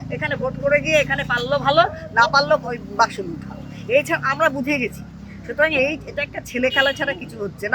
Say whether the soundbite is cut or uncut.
uncut